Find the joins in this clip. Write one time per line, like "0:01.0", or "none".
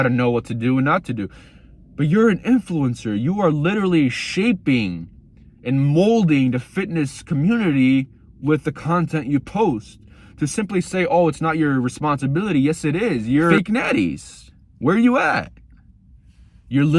0:13.5